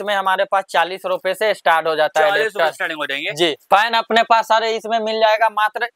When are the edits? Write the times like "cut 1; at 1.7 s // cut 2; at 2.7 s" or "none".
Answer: cut 1; at 3.6 s

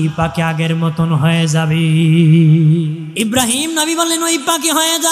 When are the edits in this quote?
cut 1; at 3.0 s

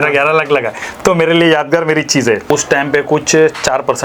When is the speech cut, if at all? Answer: cut 1; at 2.4 s

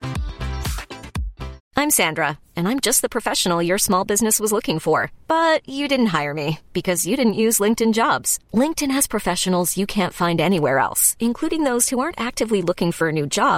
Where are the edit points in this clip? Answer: cut 1; at 1.6 s

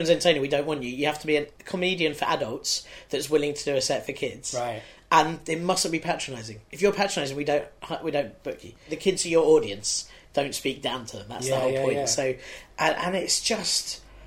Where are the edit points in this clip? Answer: cut 1; at 1.6 s // cut 2; at 8.9 s

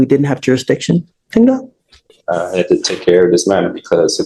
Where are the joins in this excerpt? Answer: none

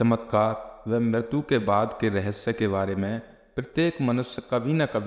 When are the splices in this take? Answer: none

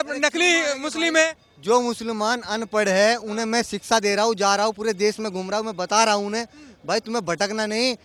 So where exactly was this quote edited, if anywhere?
none

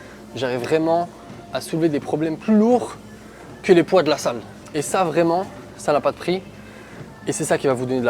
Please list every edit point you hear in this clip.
cut 1; at 4.5 s

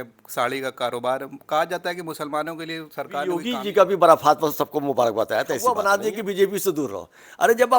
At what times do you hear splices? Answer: cut 1; at 3.4 s // cut 2; at 5.8 s

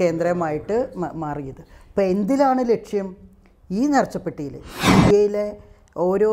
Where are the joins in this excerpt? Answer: cut 1; at 4.7 s

